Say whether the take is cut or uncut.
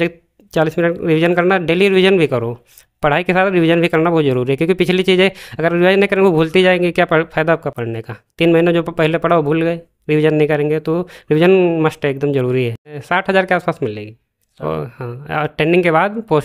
cut